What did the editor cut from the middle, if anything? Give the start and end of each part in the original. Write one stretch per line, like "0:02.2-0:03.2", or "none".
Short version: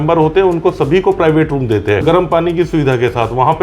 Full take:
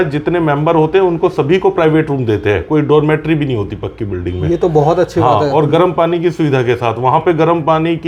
0:02.6-0:05.7